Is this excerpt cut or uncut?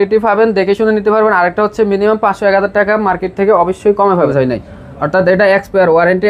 cut